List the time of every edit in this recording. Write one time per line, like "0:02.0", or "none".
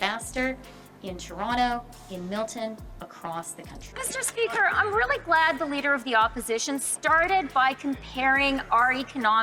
0:03.8